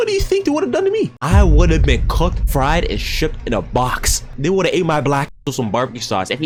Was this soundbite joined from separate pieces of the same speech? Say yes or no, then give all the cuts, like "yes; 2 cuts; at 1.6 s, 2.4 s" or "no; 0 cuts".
no; 0 cuts